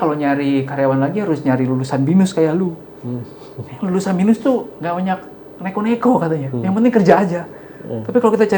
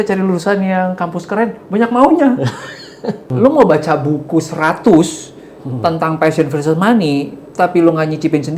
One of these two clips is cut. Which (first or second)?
second